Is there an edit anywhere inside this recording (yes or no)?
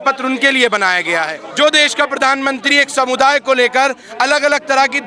yes